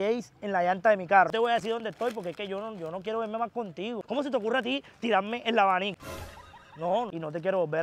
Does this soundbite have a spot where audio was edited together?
yes; 3 cuts; at 1.3 s, 4.0 s, 7.1 s

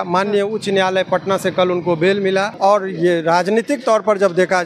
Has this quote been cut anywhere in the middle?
yes; 1 cut; at 2.5 s

